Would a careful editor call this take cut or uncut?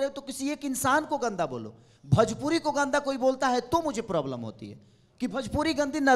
uncut